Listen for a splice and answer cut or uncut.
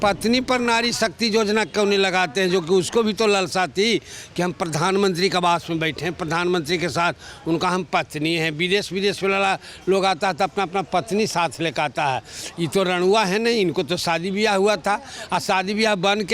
uncut